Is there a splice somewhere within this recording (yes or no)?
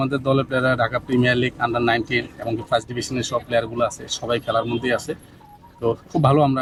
no